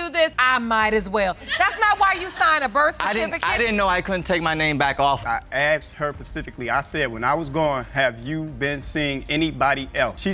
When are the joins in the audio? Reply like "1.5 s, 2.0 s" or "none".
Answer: 5.2 s